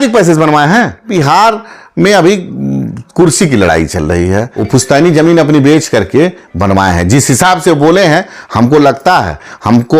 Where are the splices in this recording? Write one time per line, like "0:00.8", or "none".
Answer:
0:01.1
0:04.6